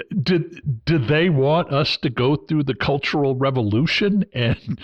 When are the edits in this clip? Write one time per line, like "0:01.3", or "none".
none